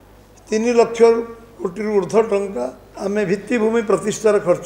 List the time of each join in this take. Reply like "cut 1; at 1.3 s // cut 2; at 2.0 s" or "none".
cut 1; at 2.8 s